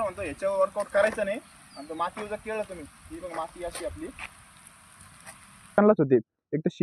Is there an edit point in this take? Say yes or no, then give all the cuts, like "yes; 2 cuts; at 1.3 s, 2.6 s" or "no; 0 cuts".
yes; 1 cut; at 5.8 s